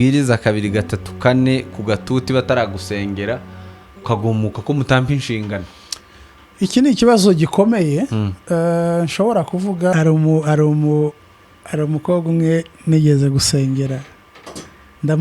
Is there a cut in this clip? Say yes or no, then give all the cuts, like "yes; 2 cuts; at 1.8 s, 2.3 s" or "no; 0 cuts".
yes; 1 cut; at 9.9 s